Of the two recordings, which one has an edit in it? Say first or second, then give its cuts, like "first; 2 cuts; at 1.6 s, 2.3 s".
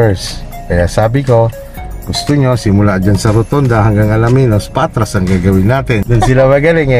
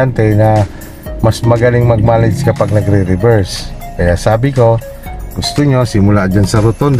first; 1 cut; at 6.0 s